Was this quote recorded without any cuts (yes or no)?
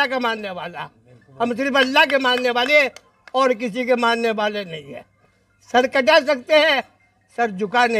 yes